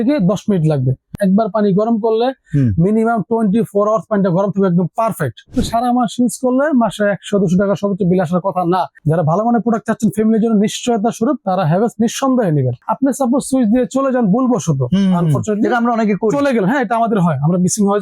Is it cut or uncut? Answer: cut